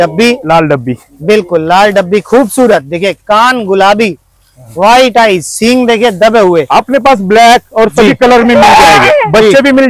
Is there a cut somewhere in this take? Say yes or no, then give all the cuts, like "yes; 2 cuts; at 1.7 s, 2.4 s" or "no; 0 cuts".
no; 0 cuts